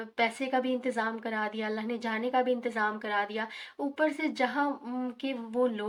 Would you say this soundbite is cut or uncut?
uncut